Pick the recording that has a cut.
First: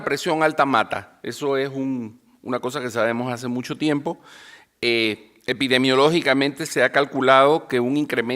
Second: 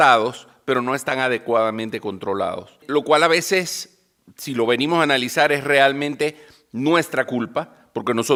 first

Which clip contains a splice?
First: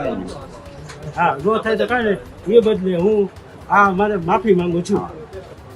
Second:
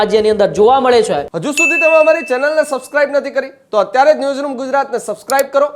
second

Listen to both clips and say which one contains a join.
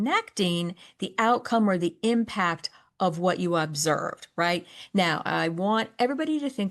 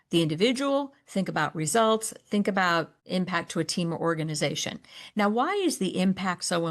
second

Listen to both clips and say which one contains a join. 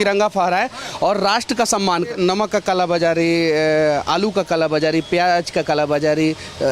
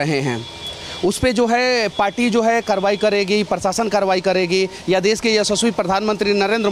first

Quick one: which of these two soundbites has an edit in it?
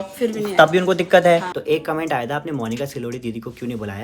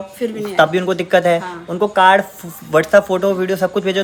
first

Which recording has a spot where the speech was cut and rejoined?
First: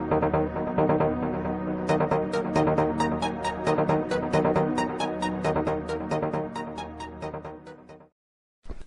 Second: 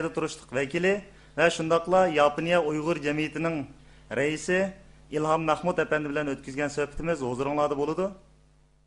first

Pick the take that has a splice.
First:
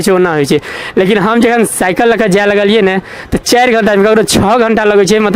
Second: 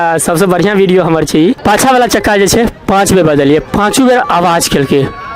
second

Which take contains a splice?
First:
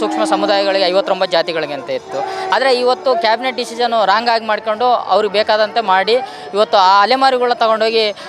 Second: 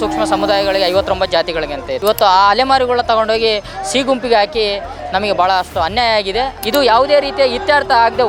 second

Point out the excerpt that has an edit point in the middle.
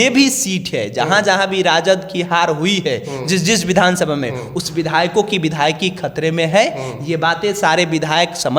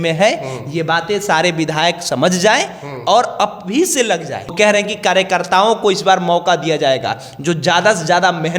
second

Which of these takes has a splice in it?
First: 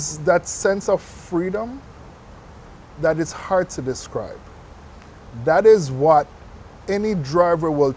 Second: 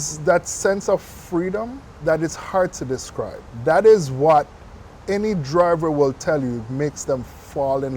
second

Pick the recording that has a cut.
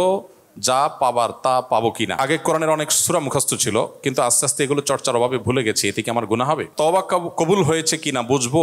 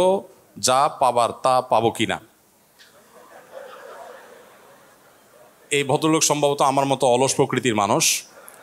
first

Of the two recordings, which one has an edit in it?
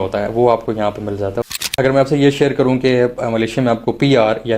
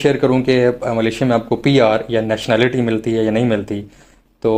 first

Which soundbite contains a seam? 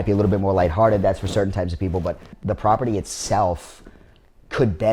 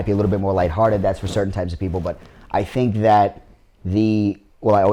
first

